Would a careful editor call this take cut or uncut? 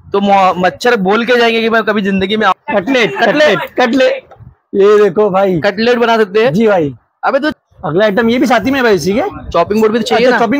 cut